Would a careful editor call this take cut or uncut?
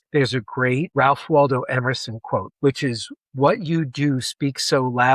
cut